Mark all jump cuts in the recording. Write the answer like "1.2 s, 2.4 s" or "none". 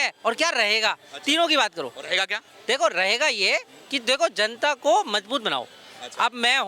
none